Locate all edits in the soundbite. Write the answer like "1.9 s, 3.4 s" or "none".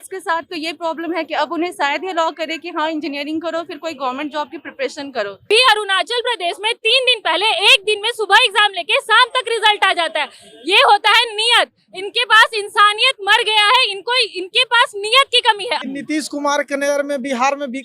5.5 s, 15.8 s

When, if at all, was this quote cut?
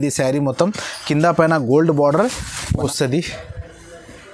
2.8 s

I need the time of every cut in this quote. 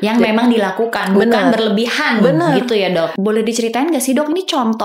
3.1 s

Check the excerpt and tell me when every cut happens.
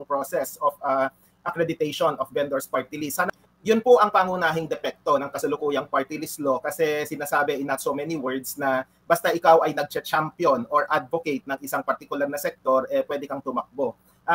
3.3 s

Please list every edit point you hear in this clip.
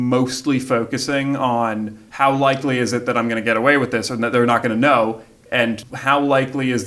2.0 s, 5.9 s

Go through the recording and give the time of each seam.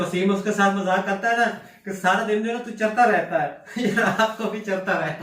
none

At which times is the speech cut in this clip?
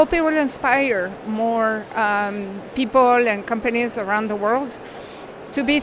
none

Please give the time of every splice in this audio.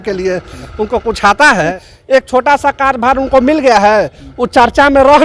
1.9 s

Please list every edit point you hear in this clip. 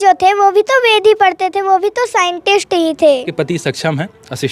3.3 s

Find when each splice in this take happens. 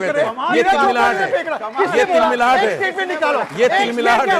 none

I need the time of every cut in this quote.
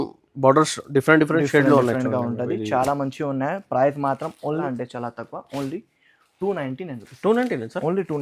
4.6 s

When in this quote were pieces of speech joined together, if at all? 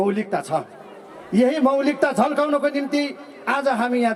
none

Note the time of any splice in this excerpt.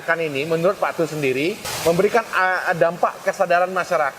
1.7 s

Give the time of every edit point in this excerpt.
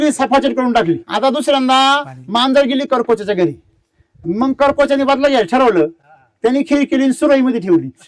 1.1 s

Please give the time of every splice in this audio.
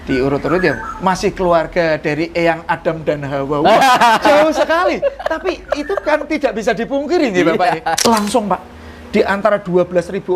8.0 s

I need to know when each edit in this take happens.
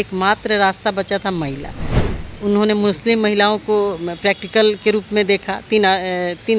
none

